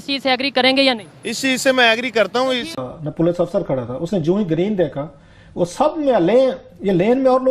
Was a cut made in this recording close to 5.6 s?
no; 1 cut; at 2.9 s

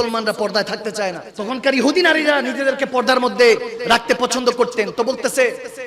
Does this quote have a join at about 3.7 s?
no; 1 cut; at 1.3 s

